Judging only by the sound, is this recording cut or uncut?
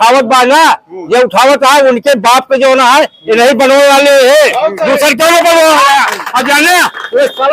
uncut